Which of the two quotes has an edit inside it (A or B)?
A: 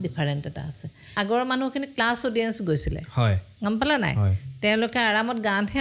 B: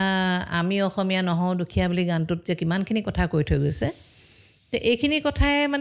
A